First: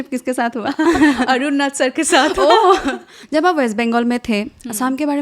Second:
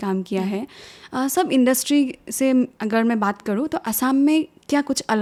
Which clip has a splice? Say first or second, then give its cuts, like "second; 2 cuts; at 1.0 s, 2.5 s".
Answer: first; 1 cut; at 3.1 s